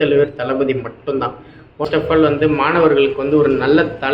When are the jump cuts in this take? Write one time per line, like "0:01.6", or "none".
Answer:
0:01.8